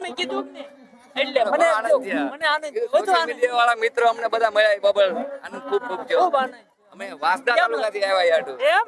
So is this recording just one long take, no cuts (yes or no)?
yes